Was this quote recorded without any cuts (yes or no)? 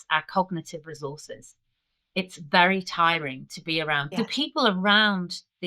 no